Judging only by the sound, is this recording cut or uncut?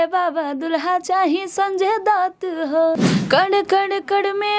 cut